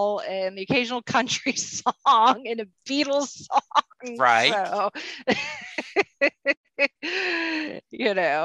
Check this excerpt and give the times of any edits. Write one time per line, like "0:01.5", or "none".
none